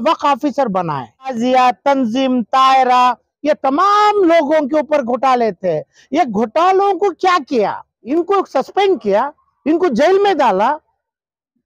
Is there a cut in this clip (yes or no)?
yes